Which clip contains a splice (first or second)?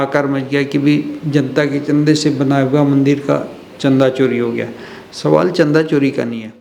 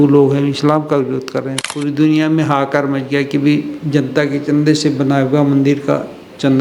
second